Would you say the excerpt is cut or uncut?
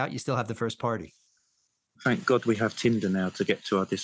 uncut